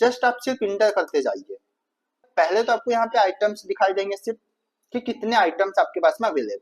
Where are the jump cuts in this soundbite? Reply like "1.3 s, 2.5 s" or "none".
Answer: 2.2 s